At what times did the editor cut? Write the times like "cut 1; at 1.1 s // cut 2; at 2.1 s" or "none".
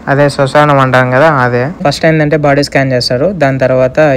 cut 1; at 1.8 s